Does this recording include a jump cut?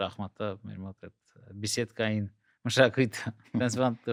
no; 0 cuts

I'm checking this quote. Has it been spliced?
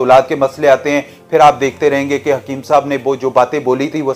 no; 0 cuts

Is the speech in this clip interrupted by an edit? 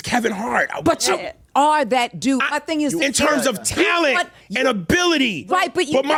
no; 0 cuts

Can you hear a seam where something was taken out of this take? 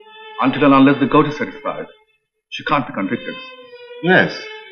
no; 0 cuts

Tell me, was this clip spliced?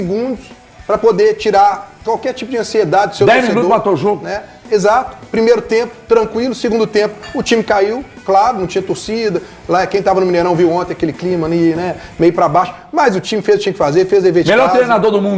no; 0 cuts

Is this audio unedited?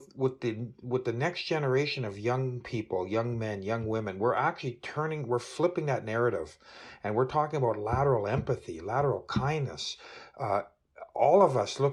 yes; 0 cuts

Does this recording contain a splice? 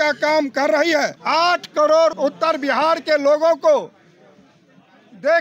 yes; 2 cuts; at 1.2 s, 2.2 s

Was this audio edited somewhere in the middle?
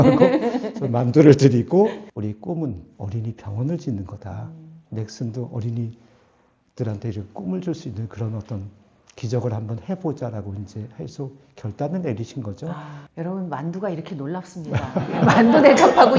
yes; 2 cuts; at 2.0 s, 13.0 s

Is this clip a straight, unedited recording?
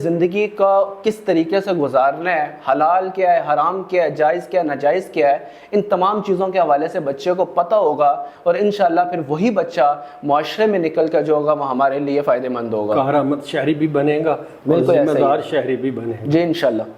yes; 0 cuts

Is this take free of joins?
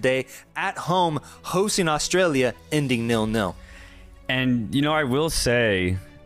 yes; 0 cuts

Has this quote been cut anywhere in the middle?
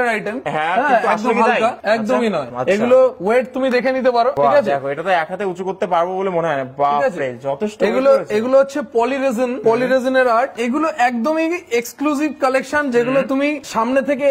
no; 0 cuts

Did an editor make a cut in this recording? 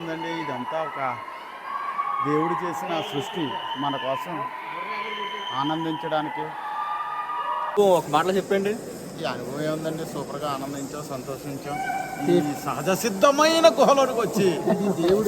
yes; 1 cut; at 7.7 s

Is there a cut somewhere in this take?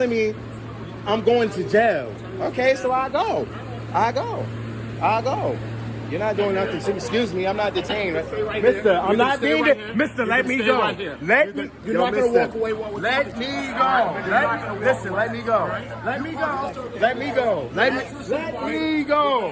no; 0 cuts

